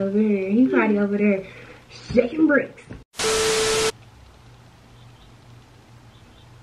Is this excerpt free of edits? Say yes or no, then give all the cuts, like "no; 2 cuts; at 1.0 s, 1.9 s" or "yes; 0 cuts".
yes; 0 cuts